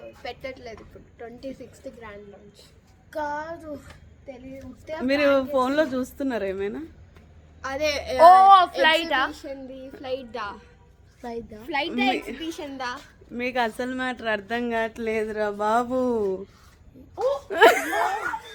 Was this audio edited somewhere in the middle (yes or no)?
no